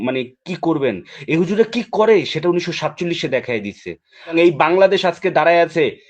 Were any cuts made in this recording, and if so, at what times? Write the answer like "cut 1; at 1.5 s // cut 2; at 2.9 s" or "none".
cut 1; at 4.3 s